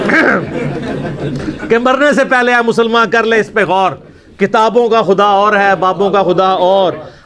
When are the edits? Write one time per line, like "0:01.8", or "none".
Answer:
none